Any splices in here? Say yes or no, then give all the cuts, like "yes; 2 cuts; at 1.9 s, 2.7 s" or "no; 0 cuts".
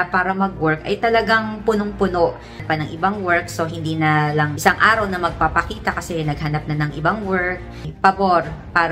yes; 2 cuts; at 2.6 s, 7.8 s